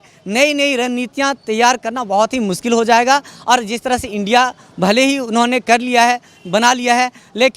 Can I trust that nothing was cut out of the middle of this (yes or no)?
yes